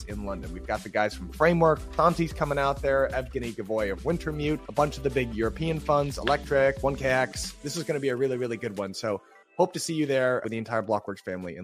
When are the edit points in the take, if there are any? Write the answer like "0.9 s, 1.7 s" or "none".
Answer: none